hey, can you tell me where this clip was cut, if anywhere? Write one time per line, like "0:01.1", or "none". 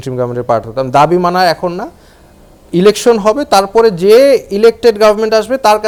none